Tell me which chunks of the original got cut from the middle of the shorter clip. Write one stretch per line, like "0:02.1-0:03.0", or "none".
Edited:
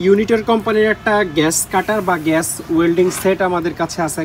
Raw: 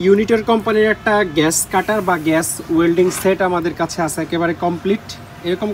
none